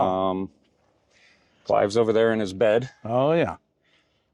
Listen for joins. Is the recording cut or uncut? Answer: uncut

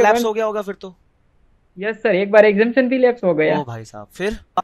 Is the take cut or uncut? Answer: uncut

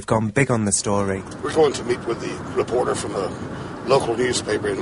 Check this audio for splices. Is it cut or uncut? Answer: cut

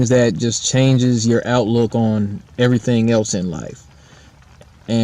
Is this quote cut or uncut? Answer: cut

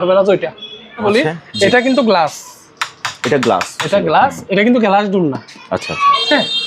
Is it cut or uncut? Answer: cut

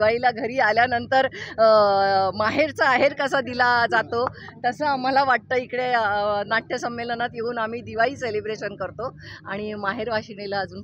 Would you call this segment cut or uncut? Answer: uncut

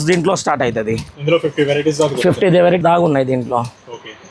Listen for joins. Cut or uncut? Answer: cut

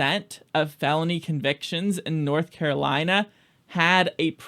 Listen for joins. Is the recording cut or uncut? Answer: uncut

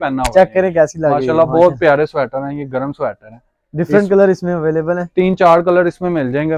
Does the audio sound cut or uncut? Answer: uncut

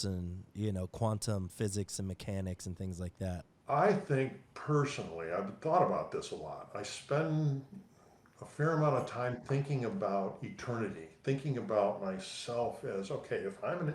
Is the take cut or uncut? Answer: cut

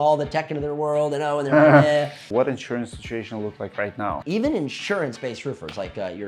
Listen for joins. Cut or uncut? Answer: cut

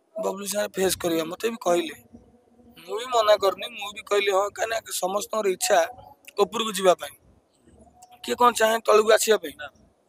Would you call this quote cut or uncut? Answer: uncut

